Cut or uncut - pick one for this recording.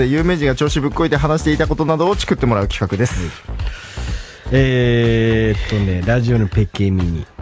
uncut